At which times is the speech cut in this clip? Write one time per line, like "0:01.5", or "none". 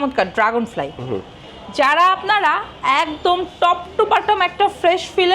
none